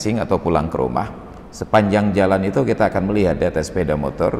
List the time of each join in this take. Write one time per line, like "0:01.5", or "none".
none